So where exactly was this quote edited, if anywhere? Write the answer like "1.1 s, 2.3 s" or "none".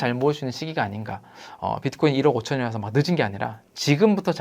1.4 s